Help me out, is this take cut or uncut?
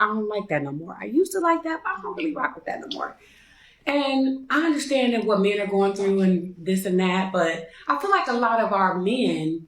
cut